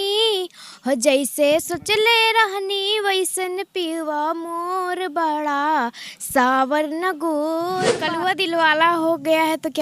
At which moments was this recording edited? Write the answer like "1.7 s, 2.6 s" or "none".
8.0 s